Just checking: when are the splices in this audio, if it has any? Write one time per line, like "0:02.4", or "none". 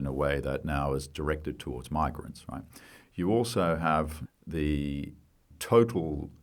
0:04.2
0:05.5